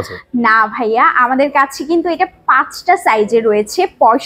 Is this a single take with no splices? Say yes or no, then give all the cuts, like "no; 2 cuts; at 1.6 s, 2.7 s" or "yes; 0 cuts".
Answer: yes; 0 cuts